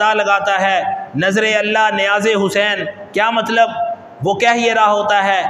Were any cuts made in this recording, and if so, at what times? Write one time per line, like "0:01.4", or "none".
none